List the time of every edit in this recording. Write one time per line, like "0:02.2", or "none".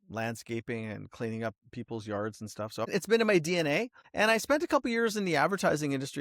0:02.9
0:04.0